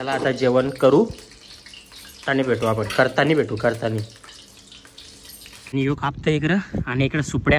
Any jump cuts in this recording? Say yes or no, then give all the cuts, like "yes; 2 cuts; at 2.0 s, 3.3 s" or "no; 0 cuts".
yes; 1 cut; at 5.7 s